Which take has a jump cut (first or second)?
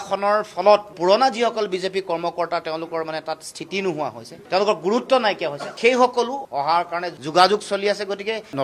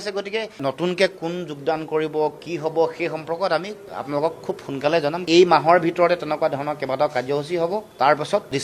first